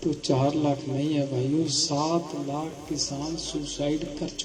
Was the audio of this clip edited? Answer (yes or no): no